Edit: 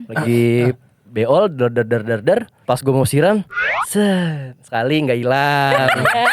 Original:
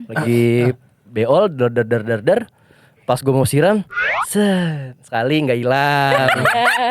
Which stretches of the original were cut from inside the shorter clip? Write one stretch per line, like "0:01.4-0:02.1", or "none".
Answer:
0:02.5-0:02.9